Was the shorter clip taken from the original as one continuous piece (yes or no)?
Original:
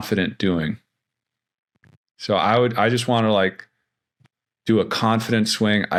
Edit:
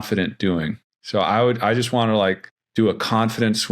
no